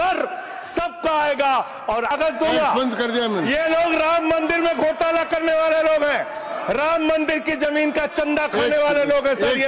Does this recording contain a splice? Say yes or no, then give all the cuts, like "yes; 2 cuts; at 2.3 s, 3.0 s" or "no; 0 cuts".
yes; 1 cut; at 2.1 s